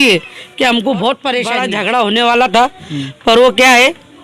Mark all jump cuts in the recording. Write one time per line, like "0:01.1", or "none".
0:01.6